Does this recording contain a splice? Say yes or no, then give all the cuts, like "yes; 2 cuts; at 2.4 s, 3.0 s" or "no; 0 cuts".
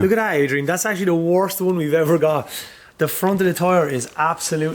no; 0 cuts